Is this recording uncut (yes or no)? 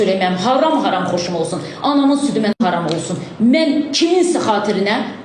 no